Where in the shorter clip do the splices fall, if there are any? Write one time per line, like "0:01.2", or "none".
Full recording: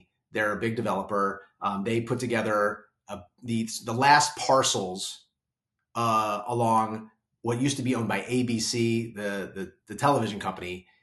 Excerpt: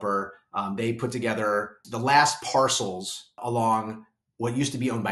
0:01.8
0:03.4